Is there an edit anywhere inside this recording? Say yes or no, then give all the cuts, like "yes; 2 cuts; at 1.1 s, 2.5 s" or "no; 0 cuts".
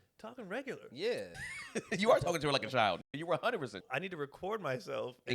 yes; 2 cuts; at 1.3 s, 3.8 s